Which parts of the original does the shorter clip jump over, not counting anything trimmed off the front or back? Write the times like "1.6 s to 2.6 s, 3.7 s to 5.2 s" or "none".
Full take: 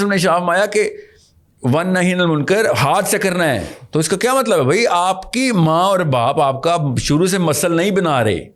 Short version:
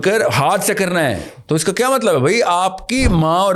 none